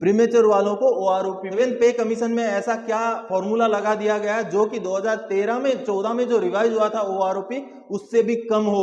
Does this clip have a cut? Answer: yes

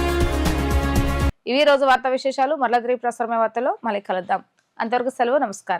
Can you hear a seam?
no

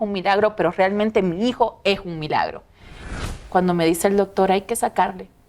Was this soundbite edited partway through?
yes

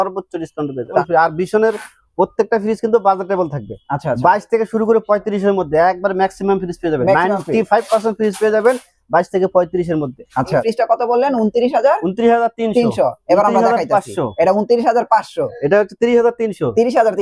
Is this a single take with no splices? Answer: no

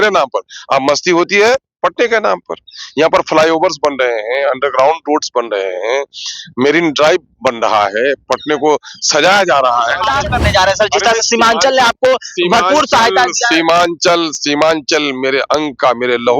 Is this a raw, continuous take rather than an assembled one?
no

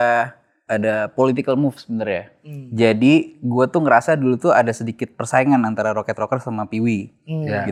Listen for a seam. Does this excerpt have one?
no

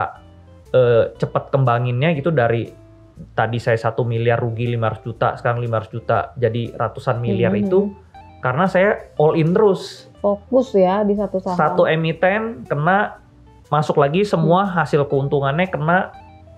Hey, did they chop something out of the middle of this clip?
no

